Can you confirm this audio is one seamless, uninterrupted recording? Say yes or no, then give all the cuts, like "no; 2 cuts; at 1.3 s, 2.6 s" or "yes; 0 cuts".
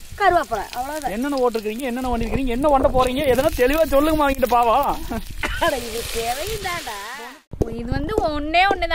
no; 1 cut; at 7.4 s